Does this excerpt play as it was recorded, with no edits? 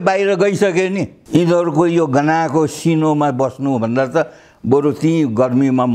no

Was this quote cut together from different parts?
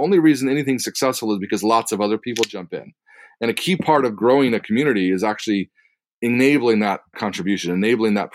no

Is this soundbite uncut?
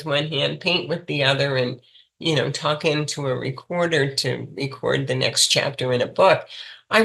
yes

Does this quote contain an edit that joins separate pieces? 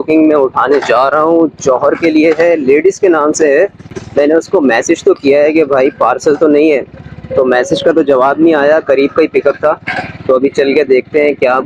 no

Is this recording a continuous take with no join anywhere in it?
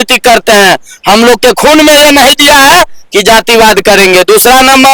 yes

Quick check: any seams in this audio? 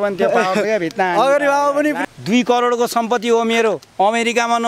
yes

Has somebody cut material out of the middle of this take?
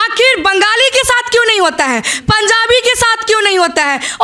no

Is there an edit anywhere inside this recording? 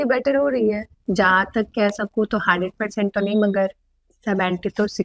yes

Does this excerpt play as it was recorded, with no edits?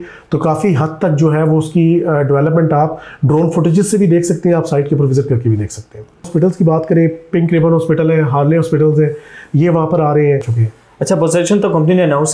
no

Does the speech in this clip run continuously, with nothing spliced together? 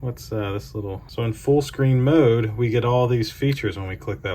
no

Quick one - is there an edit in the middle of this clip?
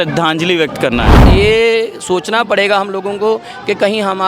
yes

